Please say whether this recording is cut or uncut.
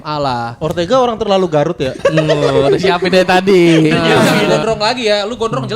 cut